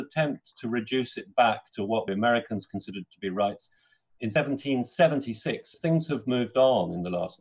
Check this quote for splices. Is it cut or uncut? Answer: cut